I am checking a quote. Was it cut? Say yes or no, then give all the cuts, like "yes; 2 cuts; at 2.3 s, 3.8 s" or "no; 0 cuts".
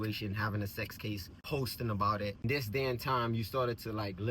yes; 2 cuts; at 1.3 s, 2.4 s